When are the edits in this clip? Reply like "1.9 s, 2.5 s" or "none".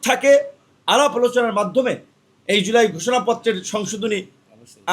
none